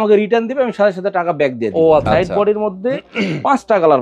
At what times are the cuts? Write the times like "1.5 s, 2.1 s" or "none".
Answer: 2.0 s